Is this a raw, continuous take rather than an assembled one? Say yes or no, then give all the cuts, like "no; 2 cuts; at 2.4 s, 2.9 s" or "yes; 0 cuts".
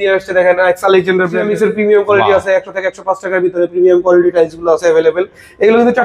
no; 1 cut; at 1.4 s